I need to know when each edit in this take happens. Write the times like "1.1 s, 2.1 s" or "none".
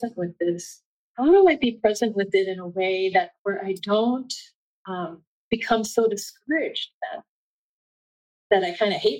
1.2 s